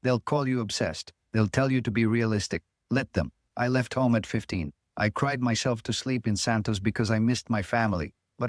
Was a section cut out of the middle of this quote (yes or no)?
yes